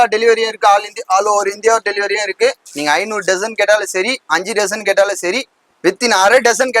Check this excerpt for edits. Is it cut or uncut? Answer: cut